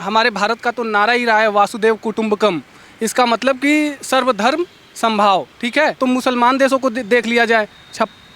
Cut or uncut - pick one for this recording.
cut